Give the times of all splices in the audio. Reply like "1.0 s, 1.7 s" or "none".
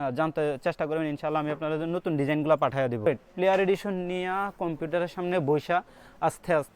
3.0 s